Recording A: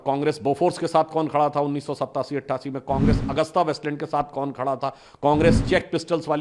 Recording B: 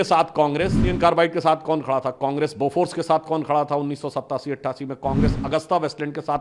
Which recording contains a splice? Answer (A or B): B